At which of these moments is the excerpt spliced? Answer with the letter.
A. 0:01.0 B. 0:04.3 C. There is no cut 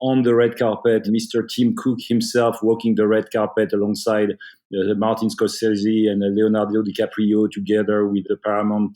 A